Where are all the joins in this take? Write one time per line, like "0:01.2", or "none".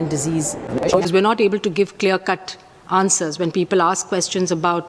0:01.0